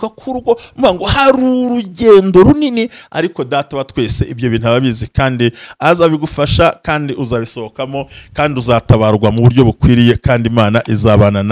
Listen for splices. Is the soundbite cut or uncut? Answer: uncut